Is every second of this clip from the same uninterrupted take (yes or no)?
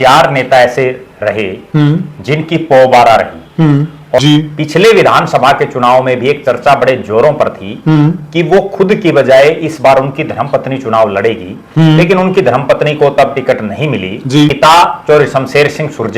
no